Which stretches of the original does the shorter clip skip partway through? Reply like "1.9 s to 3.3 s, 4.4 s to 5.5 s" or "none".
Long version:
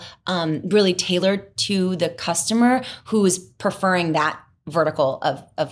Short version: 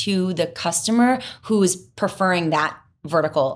none